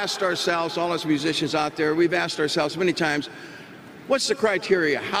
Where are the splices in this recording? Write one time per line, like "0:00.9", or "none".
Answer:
none